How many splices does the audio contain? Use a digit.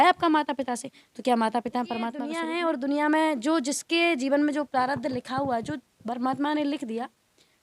1